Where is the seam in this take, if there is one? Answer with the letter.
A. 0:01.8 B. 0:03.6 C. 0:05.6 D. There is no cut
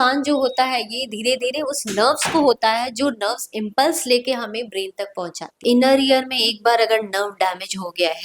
C